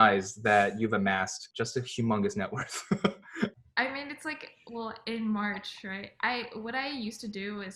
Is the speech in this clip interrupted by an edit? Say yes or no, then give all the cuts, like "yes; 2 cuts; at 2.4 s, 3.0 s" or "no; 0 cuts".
yes; 1 cut; at 3.6 s